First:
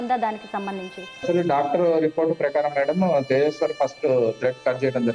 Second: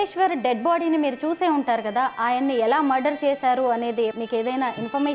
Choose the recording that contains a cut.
second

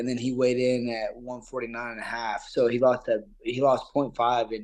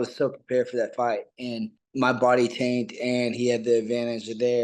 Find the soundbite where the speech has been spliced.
second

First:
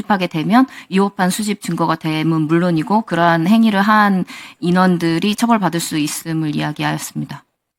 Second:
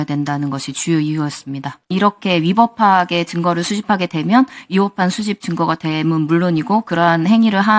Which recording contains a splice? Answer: second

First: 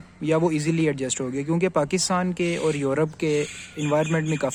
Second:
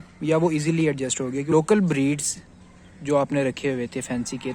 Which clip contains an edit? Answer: second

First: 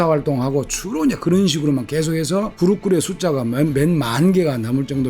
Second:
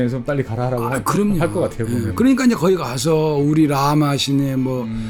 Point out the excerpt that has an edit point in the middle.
first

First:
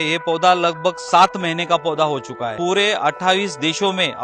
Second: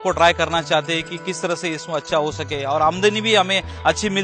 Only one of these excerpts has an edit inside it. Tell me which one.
first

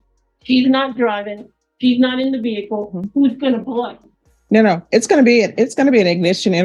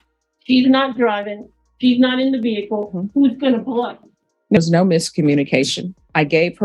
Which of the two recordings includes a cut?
second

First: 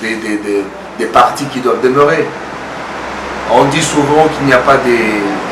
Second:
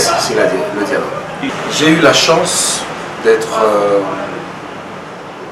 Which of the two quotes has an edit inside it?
second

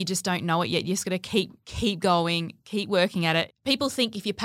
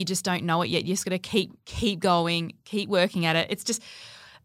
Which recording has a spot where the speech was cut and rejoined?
first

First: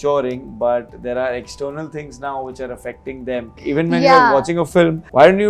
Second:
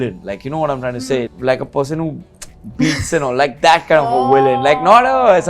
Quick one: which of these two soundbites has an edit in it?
first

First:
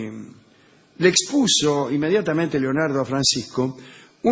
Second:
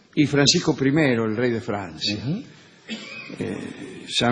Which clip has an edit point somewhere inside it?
first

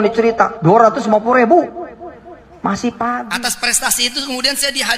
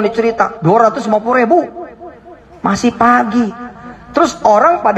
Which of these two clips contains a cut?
first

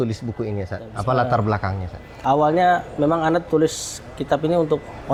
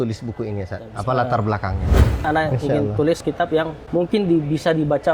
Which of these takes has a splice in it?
second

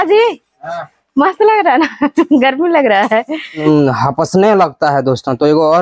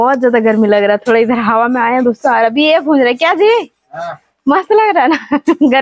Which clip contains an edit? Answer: first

